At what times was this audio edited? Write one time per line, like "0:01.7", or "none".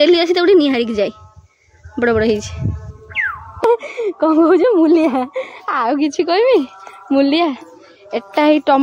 0:03.6